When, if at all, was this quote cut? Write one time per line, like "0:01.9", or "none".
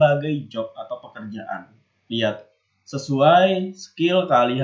none